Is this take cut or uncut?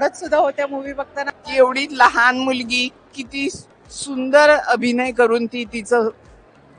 cut